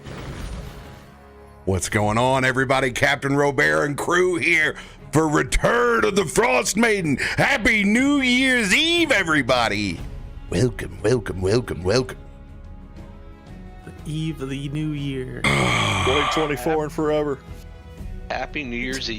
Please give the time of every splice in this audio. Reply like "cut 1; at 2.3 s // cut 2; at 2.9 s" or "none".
cut 1; at 1.0 s

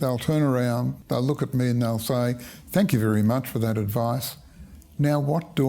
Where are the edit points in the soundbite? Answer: cut 1; at 1.0 s

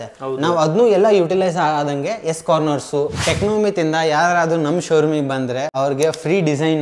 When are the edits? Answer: cut 1; at 3.2 s // cut 2; at 5.7 s

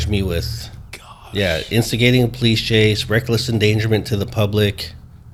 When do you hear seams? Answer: none

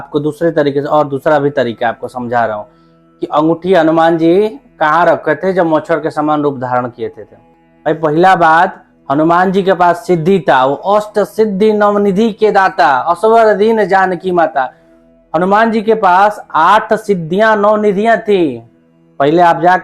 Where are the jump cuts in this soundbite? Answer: none

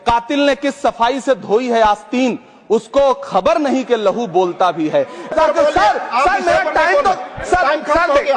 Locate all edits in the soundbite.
cut 1; at 5.3 s

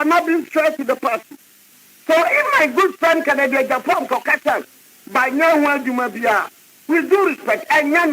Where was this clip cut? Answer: cut 1; at 2.9 s

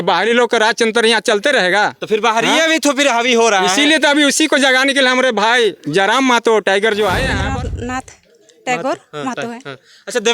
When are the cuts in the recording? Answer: cut 1; at 7.3 s

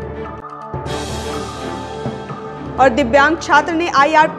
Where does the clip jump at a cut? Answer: cut 1; at 2.5 s

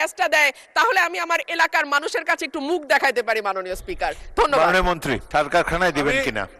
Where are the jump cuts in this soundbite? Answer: cut 1; at 5.2 s

